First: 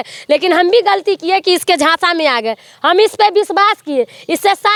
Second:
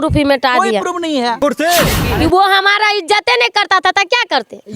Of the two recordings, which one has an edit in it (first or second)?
second